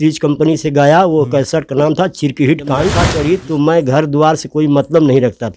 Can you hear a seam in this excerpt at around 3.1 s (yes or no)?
yes